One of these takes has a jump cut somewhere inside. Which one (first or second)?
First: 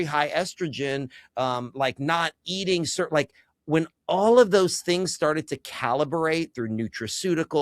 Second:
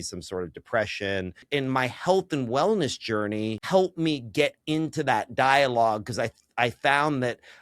second